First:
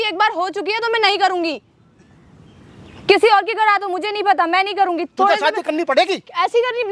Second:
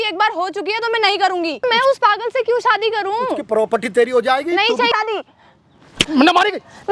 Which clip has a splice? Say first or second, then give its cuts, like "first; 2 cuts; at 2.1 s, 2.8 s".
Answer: second; 2 cuts; at 1.6 s, 4.9 s